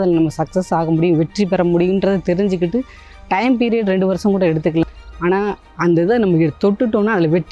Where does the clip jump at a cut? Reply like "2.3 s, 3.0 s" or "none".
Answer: 4.8 s